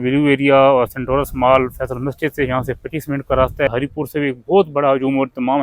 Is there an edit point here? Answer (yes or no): yes